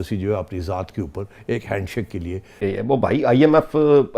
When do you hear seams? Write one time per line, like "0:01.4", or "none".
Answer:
0:02.5